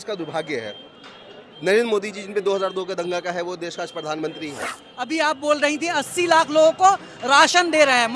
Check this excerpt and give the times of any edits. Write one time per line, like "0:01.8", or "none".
0:05.0